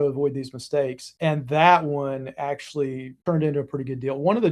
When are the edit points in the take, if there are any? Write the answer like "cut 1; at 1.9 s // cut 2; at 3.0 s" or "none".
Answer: cut 1; at 1.0 s // cut 2; at 3.1 s